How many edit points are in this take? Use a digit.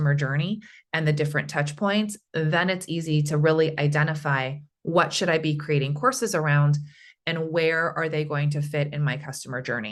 0